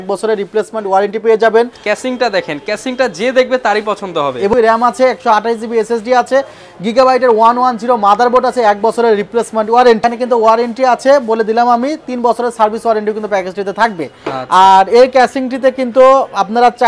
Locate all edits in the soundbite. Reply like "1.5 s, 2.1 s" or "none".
1.8 s, 4.5 s, 10.0 s